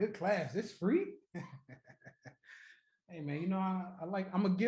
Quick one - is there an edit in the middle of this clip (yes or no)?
no